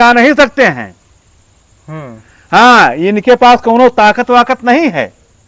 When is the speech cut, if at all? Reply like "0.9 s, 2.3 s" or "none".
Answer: none